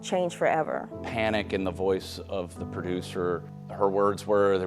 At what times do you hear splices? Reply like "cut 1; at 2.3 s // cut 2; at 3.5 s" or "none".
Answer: cut 1; at 0.9 s // cut 2; at 3.6 s